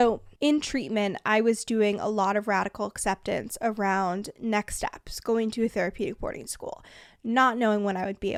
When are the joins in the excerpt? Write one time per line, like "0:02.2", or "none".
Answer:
none